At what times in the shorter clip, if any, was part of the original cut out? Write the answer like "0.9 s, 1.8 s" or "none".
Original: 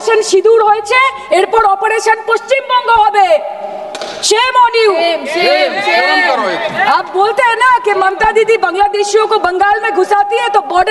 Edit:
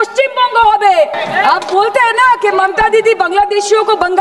1.2 s